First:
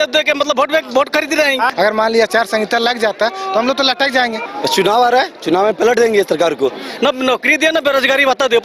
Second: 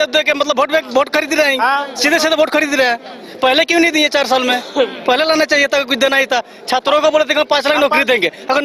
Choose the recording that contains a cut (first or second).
first